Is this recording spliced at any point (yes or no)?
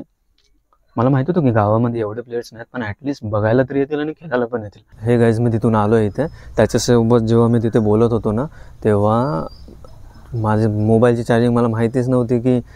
yes